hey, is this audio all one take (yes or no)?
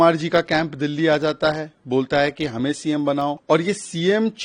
no